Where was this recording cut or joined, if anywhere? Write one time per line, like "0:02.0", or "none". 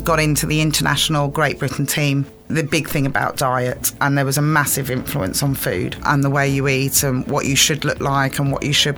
0:02.5
0:06.0